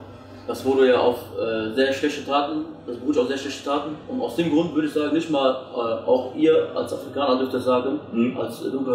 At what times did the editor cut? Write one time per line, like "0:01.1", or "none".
none